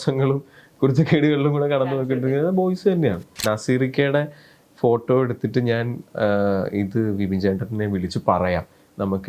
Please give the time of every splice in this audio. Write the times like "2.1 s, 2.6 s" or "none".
3.4 s